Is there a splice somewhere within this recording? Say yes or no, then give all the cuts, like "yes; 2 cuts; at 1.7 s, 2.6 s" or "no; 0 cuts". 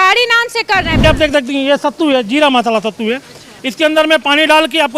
yes; 1 cut; at 1.0 s